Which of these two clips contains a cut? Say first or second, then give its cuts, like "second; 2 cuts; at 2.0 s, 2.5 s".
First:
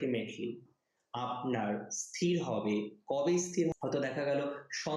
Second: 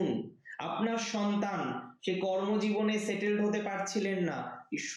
first; 1 cut; at 3.7 s